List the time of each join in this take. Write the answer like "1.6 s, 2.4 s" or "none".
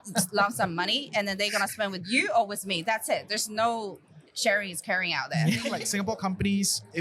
5.8 s